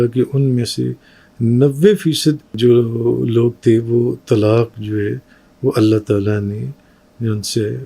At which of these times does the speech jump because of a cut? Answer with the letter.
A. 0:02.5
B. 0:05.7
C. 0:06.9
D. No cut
A